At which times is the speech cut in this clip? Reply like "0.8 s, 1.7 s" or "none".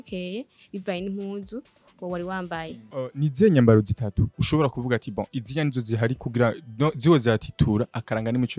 3.0 s